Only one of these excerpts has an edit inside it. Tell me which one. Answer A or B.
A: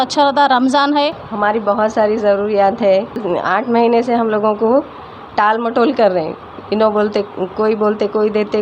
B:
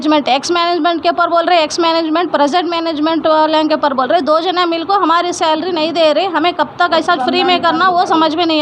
A